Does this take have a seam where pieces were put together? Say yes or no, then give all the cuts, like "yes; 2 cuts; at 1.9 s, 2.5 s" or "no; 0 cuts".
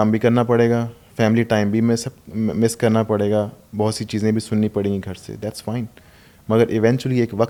no; 0 cuts